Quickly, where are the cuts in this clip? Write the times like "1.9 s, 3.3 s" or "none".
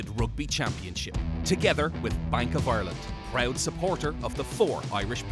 none